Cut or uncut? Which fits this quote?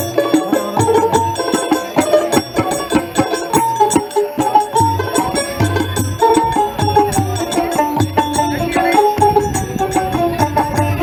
uncut